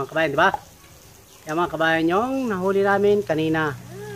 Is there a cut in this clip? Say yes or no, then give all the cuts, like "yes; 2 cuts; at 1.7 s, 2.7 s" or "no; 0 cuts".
no; 0 cuts